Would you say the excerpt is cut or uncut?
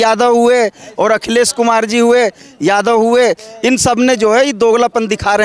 uncut